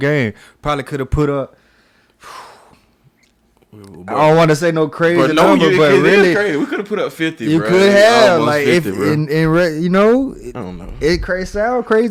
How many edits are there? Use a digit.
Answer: 0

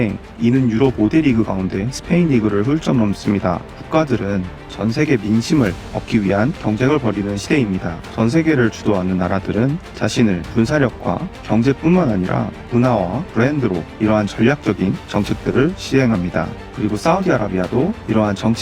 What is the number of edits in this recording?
3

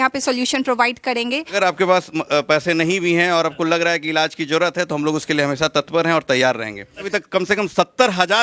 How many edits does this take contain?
2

